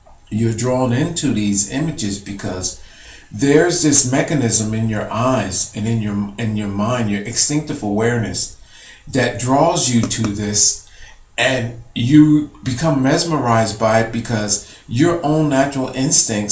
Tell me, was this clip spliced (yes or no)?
yes